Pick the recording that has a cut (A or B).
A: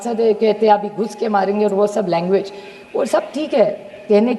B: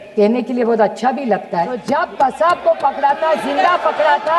B